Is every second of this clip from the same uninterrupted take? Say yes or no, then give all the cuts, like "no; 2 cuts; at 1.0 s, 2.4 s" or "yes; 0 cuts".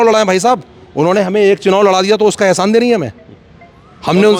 yes; 0 cuts